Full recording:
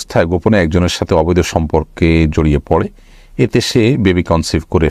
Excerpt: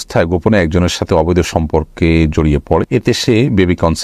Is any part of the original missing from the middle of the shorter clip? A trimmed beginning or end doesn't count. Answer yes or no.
yes